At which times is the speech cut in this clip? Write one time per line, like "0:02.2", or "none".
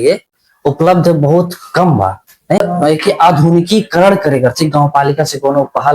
0:02.6